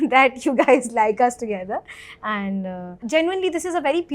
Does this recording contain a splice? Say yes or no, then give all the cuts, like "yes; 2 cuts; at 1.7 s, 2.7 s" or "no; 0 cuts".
yes; 1 cut; at 3.0 s